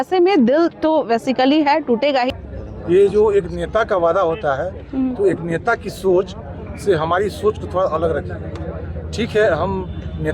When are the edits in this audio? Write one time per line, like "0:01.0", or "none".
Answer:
0:02.4

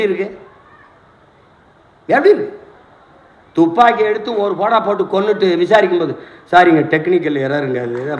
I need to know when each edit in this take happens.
none

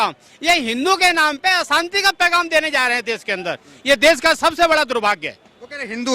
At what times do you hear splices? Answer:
none

